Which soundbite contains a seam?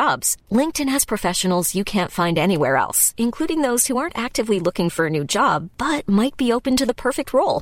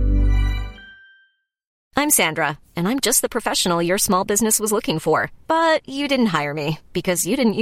second; 1 cut; at 1.7 s

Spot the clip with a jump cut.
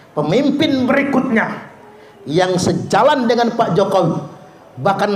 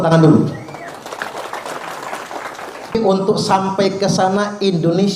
second; 1 cut; at 2.9 s

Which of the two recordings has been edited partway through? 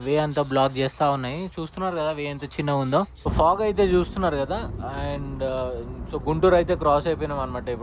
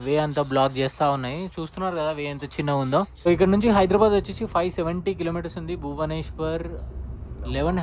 first; 1 cut; at 3.1 s

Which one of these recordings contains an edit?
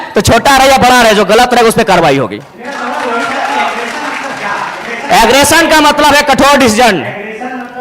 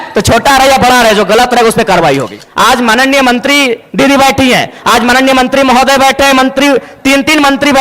second; 1 cut; at 2.4 s

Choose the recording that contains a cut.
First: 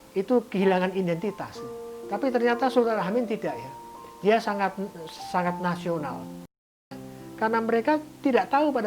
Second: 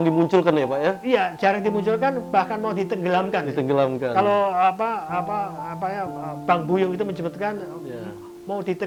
first; 1 cut; at 6.9 s

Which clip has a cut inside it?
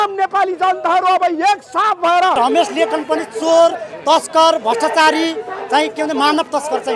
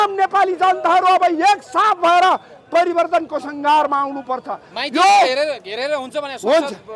first; 1 cut; at 2.4 s

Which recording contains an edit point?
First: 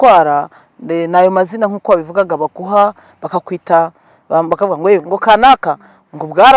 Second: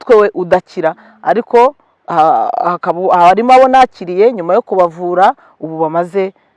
first; 1 cut; at 5.0 s

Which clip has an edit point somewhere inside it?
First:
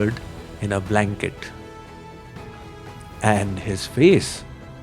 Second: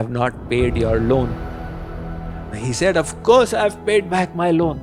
first; 2 cuts; at 1.4 s, 3.0 s

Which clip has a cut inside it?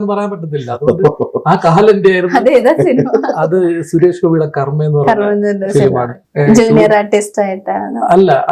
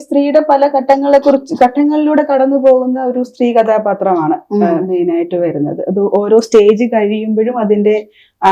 first; 1 cut; at 6.2 s

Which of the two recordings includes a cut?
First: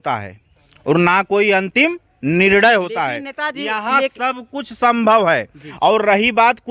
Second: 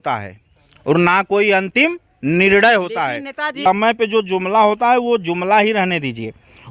second; 1 cut; at 3.7 s

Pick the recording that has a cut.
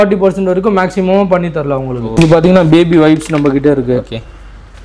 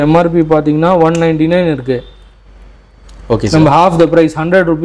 first; 1 cut; at 2.0 s

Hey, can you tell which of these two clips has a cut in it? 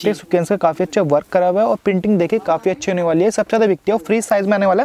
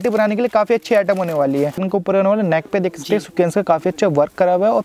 second; 1 cut; at 1.8 s

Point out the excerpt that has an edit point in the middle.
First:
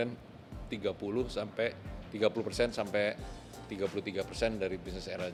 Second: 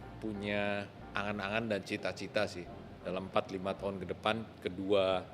second; 2 cuts; at 1.0 s, 4.5 s

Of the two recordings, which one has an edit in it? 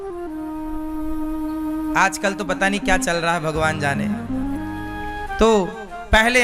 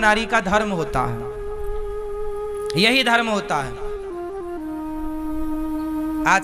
first; 1 cut; at 5.0 s

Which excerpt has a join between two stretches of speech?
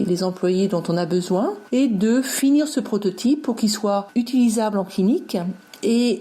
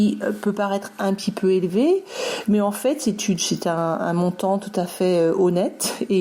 first; 2 cuts; at 1.6 s, 4.1 s

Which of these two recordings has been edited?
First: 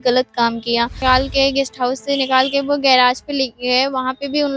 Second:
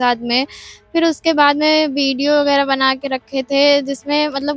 first; 1 cut; at 1.0 s

